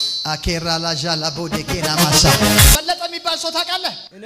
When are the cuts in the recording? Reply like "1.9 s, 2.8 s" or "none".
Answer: 2.8 s

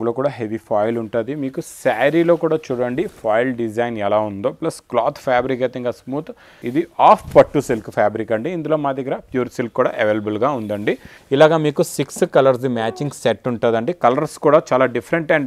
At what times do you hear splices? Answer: 6.5 s, 11.1 s

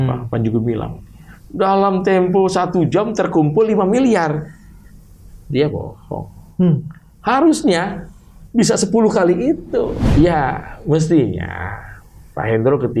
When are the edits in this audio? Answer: 10.0 s

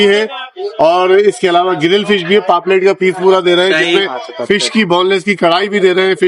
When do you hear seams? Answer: none

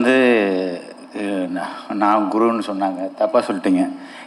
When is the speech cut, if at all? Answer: none

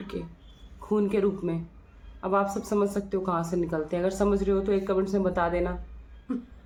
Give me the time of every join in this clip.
none

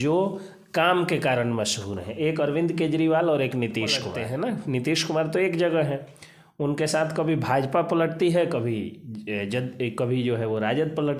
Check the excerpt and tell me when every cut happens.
3.9 s

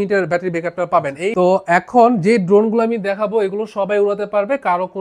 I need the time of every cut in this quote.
1.3 s, 2.2 s

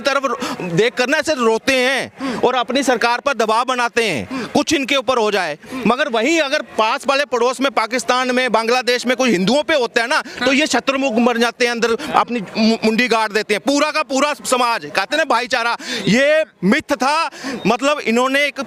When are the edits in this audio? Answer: none

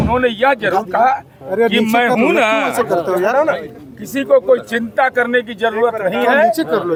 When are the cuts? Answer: none

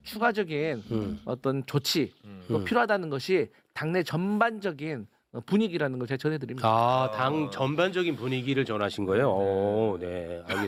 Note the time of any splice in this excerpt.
none

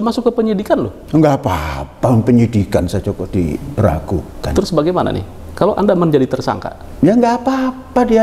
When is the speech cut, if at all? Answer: none

